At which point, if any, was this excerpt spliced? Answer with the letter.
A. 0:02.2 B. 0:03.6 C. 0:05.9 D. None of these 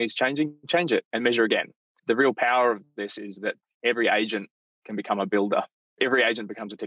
C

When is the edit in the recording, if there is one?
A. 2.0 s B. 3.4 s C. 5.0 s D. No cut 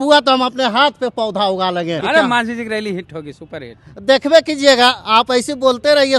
A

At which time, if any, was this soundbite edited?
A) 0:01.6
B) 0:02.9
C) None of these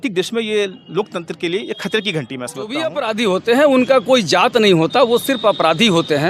B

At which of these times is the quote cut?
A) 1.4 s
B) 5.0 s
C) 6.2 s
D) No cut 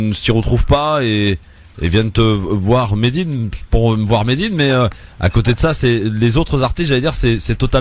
A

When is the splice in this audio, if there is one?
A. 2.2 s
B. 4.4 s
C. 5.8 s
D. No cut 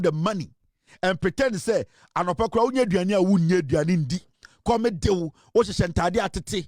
D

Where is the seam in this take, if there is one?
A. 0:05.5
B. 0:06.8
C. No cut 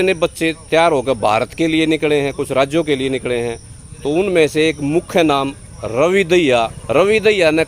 B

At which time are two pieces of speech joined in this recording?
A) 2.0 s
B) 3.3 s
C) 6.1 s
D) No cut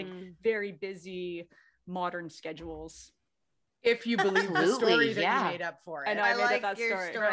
D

